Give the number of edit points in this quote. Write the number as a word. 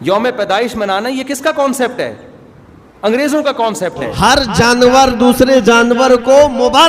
one